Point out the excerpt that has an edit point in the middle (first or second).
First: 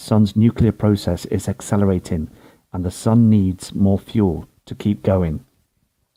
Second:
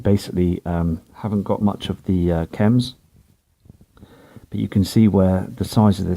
second